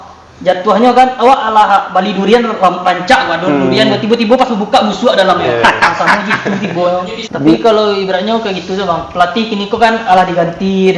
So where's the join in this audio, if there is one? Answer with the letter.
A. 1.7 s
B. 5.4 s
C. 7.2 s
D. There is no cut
C